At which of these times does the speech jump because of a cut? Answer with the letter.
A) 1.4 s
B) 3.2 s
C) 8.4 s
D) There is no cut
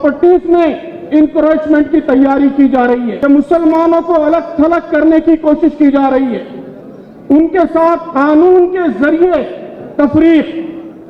B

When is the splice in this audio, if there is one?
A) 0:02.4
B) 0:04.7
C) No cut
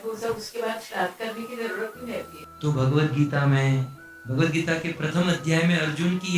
A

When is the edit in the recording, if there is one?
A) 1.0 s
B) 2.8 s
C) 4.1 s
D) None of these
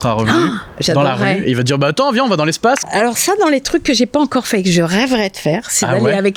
B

